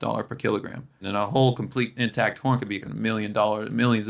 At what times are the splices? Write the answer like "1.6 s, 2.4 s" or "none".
1.0 s, 2.9 s